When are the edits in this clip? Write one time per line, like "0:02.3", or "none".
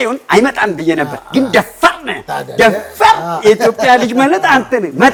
none